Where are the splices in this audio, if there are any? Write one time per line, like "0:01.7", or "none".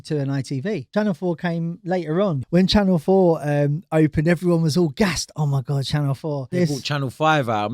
0:00.9
0:02.4
0:06.5

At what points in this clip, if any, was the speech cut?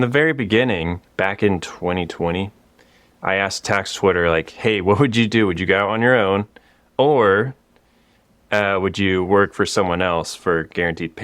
0:01.0

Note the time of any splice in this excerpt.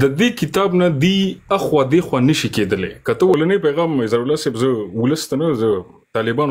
0:03.3

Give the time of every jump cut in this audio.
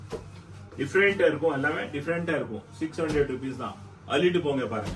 none

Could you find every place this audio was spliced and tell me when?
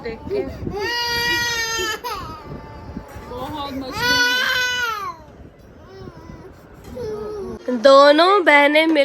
0:07.5

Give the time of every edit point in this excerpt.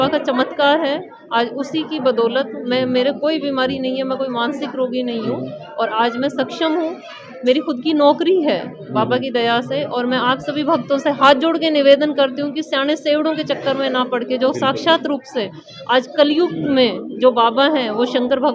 none

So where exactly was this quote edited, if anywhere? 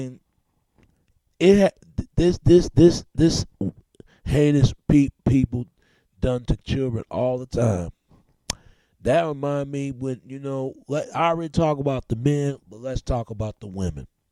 none

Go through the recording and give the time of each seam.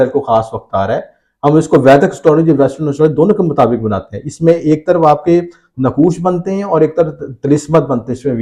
none

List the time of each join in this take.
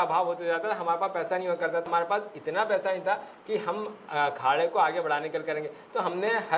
0:01.9

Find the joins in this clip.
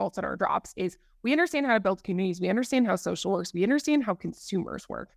none

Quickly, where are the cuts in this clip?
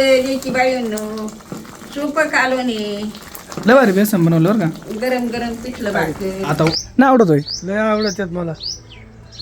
0:06.8

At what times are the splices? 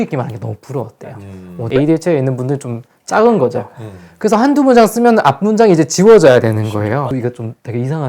0:01.6
0:07.2

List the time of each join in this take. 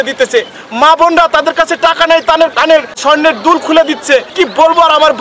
0:03.0
0:04.3

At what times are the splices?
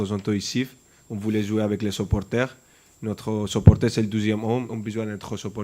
0:04.7

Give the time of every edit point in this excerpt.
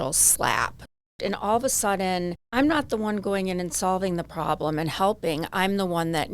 0:01.0
0:02.4

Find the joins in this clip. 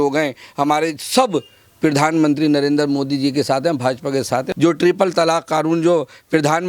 0:04.5

